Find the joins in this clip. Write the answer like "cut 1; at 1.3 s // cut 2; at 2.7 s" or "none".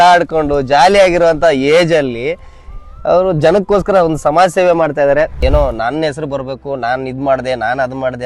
cut 1; at 5.4 s